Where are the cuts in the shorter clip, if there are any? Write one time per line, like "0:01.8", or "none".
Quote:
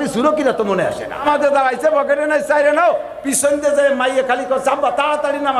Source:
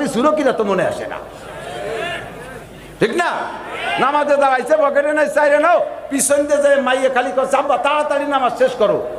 0:01.2